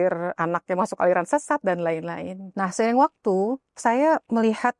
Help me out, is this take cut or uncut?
uncut